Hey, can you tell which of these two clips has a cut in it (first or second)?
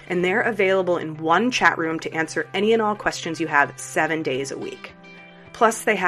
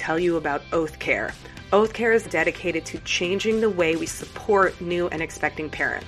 second